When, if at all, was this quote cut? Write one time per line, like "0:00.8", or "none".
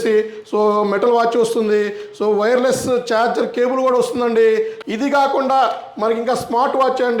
0:04.8